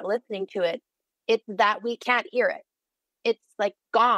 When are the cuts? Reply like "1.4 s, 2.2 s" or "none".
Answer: none

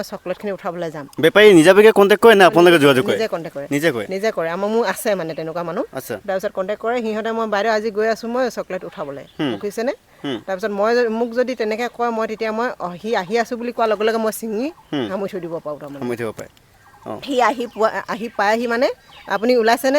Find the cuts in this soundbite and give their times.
none

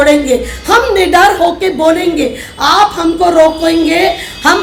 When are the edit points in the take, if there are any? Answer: none

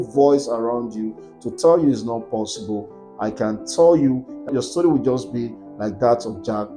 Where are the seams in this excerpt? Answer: 4.5 s

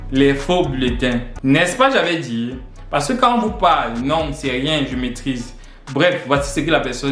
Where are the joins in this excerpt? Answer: 1.3 s

